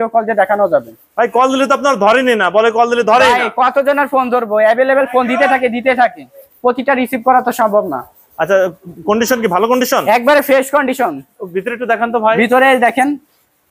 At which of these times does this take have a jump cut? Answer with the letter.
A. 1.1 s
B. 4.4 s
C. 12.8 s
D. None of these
D